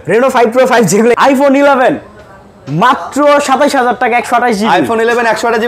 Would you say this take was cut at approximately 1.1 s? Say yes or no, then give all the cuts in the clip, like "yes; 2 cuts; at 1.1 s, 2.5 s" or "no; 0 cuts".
yes; 1 cut; at 1.1 s